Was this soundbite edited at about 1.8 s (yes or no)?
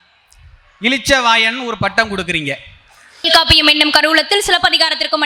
no